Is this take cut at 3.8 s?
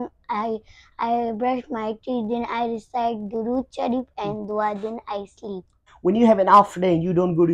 no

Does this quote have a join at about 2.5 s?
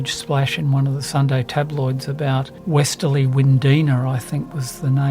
yes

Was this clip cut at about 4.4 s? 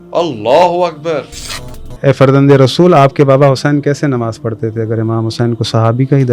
no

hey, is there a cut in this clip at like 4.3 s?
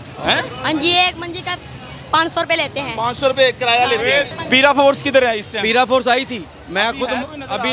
no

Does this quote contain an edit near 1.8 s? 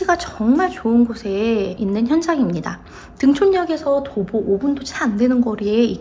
yes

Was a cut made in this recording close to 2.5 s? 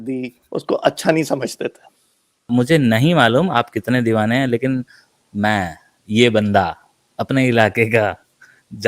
yes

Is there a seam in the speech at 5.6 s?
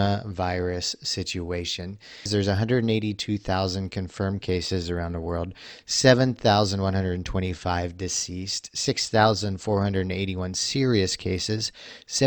no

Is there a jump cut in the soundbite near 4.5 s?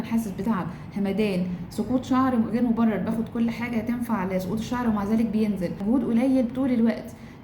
no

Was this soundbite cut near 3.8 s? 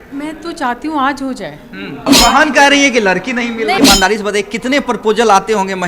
yes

